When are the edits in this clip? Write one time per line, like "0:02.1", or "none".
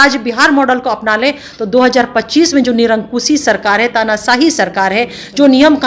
none